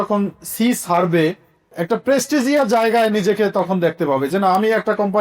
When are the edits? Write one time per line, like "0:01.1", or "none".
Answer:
0:01.7